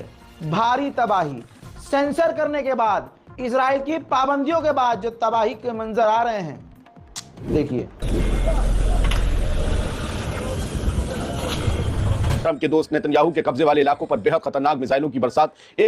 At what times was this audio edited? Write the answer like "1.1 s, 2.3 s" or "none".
12.4 s